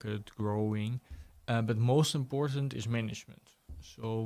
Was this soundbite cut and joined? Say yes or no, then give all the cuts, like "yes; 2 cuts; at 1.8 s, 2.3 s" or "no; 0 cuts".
no; 0 cuts